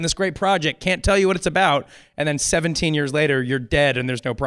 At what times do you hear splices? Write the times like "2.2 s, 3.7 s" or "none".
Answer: none